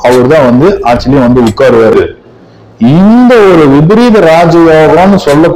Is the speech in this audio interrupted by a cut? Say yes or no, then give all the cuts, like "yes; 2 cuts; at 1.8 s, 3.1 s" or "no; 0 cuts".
yes; 1 cut; at 1.9 s